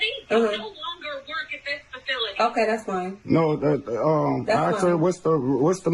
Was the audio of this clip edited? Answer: no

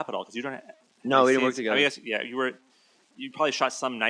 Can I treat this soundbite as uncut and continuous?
no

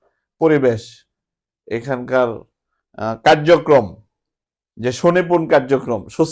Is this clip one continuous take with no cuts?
yes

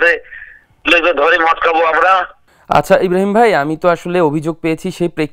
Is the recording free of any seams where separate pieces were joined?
yes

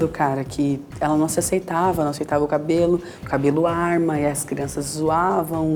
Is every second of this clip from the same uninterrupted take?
yes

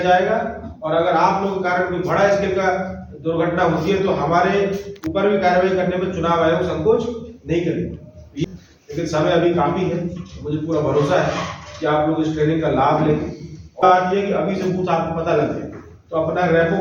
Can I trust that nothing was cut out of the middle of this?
no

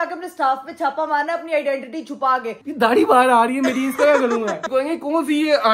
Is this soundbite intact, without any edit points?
no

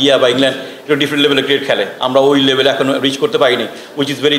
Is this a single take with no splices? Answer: yes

